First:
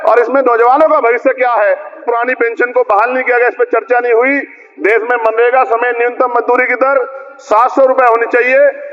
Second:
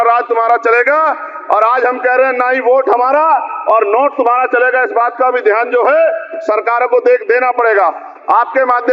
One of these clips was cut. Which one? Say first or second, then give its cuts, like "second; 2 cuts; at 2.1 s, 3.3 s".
first; 1 cut; at 2.1 s